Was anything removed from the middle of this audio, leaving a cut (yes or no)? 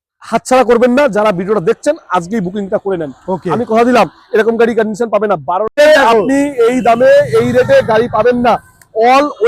yes